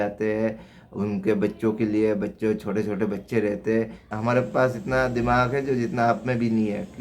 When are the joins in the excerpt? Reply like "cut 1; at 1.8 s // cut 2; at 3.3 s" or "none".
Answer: cut 1; at 4.2 s